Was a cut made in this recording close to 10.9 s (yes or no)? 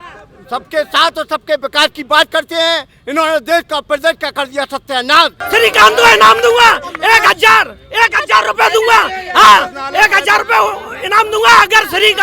no